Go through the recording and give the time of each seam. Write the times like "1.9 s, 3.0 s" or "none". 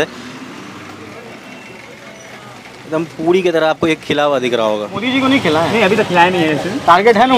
5.1 s